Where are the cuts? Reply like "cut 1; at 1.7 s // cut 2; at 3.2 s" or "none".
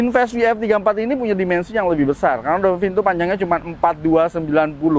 none